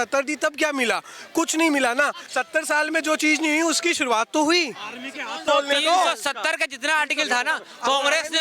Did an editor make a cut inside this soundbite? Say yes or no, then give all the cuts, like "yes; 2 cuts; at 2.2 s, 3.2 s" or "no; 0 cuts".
yes; 2 cuts; at 2.2 s, 5.4 s